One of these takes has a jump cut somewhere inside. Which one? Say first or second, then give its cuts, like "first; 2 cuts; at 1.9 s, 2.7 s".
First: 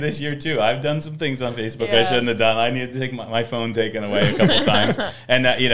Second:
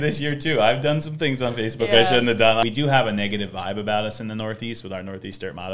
second; 1 cut; at 2.6 s